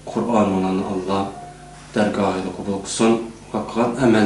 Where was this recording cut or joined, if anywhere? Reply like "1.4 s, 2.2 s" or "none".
2.3 s